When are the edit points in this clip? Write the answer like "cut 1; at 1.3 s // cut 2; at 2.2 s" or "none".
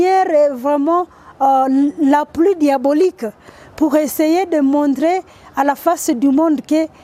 none